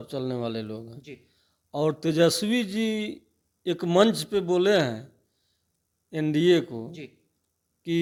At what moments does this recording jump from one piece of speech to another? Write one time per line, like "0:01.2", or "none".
none